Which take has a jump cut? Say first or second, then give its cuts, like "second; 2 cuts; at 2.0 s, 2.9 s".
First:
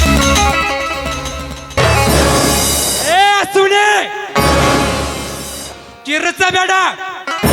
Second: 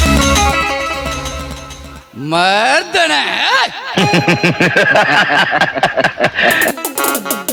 first; 1 cut; at 1.8 s